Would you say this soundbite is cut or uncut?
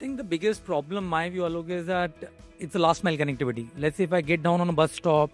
uncut